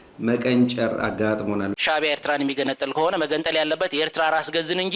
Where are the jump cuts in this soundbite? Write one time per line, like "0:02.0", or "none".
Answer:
0:01.7